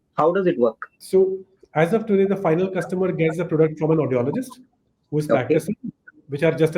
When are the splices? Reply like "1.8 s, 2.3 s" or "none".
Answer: 0.9 s